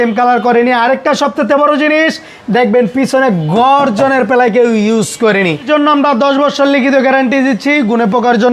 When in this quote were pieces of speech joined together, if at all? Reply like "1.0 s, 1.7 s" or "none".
5.7 s